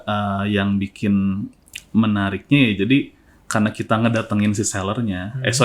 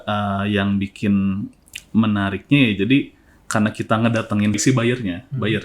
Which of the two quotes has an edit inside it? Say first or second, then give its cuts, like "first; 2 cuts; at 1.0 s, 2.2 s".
second; 1 cut; at 4.6 s